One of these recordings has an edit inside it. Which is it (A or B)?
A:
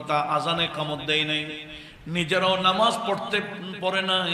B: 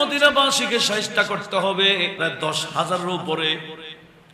B